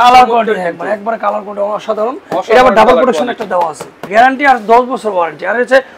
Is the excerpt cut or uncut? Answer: cut